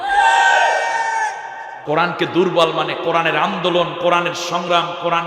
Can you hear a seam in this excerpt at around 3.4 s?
no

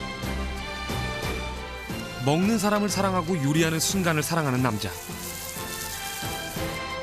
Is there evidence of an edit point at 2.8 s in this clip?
yes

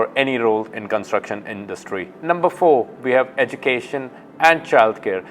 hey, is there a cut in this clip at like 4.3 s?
no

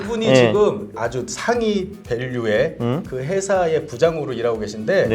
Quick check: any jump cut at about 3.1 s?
no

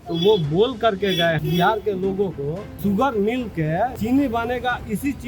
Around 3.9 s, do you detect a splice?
yes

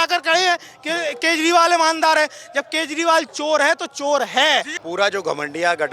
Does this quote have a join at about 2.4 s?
no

